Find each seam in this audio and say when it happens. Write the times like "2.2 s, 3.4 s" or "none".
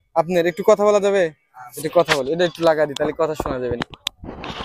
none